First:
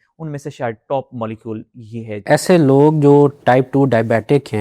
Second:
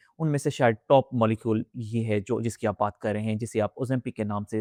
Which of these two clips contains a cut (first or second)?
first